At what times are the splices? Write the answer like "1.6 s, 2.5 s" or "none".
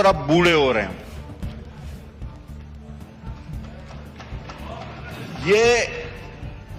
none